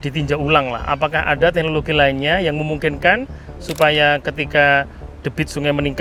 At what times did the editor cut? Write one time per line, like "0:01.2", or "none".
none